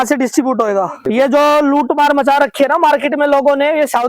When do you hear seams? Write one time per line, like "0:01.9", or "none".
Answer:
0:01.0